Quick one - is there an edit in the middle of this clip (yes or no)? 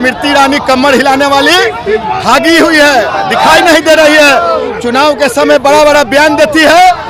no